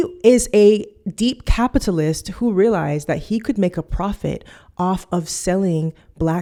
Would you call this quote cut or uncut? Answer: uncut